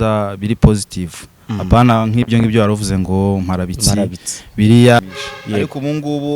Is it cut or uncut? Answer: cut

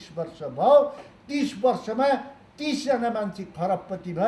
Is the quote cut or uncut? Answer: uncut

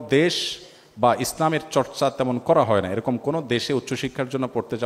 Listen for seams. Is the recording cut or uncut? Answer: uncut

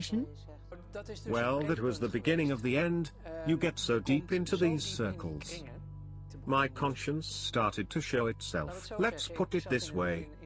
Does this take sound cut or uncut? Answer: uncut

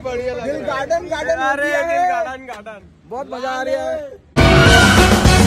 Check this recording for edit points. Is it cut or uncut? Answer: cut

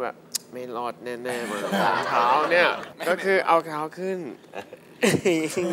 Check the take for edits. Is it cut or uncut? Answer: cut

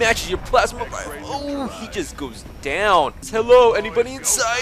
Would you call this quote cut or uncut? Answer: cut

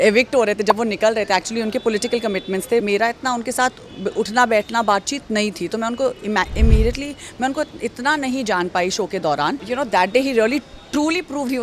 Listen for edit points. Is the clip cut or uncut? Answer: cut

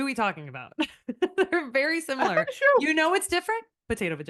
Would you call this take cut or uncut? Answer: uncut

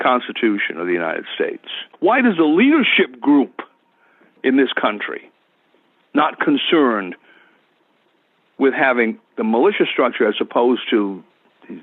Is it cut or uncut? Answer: cut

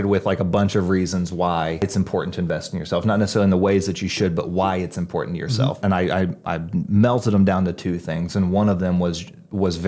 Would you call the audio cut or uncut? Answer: cut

